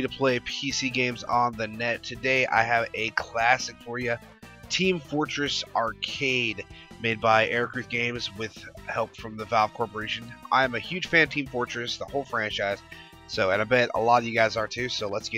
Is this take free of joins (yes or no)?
no